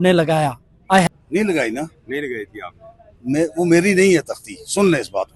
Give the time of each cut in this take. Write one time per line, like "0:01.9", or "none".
0:01.1